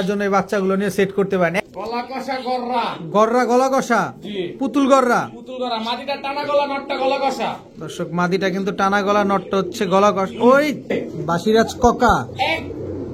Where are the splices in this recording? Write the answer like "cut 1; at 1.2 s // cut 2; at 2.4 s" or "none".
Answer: cut 1; at 1.5 s // cut 2; at 11.0 s